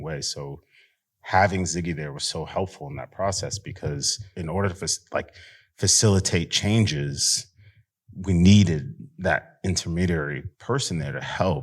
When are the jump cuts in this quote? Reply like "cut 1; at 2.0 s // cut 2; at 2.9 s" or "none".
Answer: cut 1; at 4.3 s // cut 2; at 10.5 s